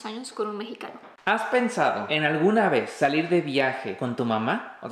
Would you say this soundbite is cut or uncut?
cut